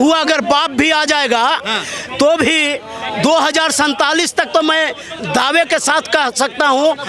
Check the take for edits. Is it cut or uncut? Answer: uncut